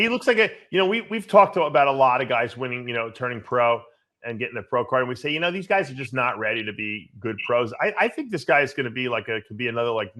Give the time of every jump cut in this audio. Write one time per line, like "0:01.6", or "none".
none